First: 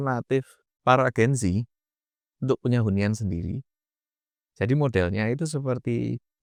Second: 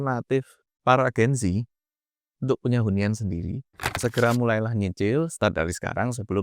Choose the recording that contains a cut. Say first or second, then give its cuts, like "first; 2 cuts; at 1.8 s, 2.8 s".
second; 1 cut; at 4.0 s